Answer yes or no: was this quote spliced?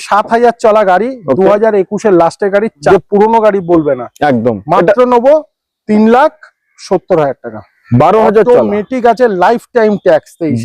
yes